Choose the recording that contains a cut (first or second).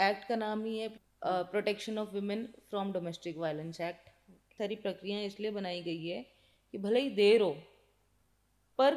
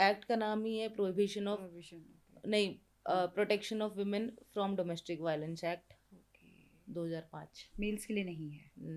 first